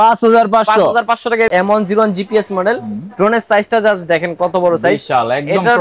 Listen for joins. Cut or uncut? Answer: cut